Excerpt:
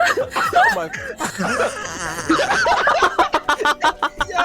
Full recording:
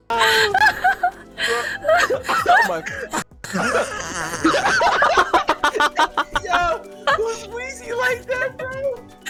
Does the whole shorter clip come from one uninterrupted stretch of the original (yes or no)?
no